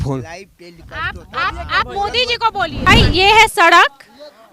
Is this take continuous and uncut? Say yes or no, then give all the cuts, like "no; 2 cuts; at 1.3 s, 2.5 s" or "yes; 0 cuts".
no; 1 cut; at 2.9 s